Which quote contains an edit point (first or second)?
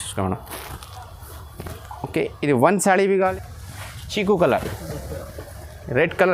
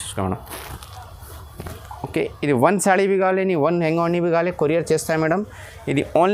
first